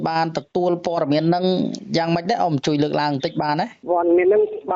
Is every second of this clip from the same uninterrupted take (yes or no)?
no